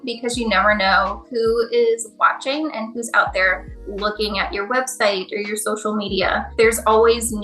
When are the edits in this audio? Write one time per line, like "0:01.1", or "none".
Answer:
0:06.5